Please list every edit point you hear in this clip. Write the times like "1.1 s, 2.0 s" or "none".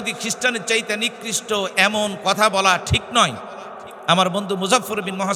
none